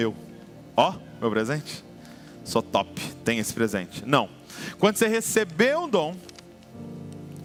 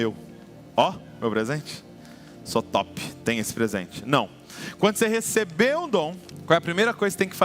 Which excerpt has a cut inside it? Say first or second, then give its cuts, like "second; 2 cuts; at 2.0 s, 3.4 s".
second; 1 cut; at 6.3 s